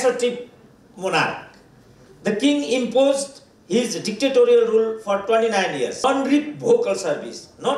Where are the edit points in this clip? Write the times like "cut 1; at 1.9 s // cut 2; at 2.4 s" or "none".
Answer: cut 1; at 6.0 s